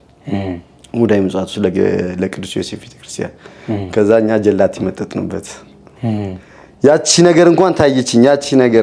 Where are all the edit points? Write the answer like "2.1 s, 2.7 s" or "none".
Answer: none

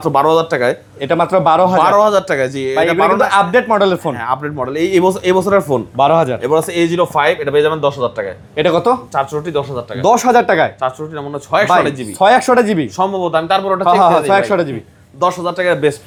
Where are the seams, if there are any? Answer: none

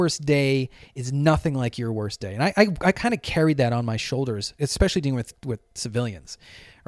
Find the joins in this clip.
4.5 s

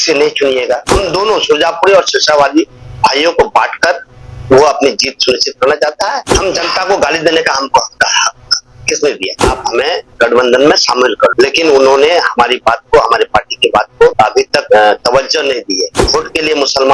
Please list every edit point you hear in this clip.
0.9 s, 6.3 s, 9.4 s, 15.9 s

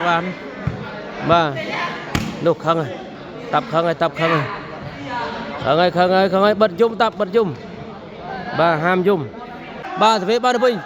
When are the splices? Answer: 9.8 s

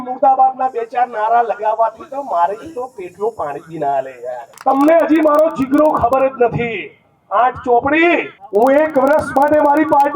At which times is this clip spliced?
4.5 s, 8.4 s

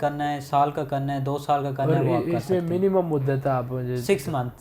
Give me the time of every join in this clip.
none

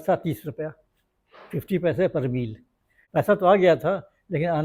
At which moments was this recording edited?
3.0 s

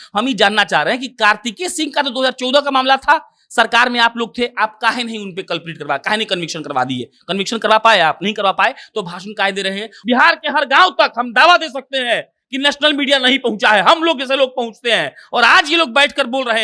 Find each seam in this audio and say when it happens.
9.9 s

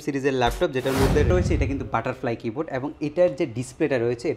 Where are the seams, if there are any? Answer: 1.3 s

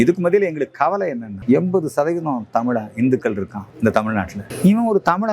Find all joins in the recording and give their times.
1.3 s, 3.6 s, 4.4 s

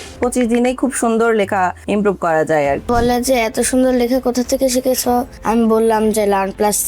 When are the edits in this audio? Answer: 2.9 s, 5.3 s

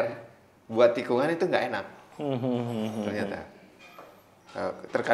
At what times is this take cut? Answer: 3.9 s

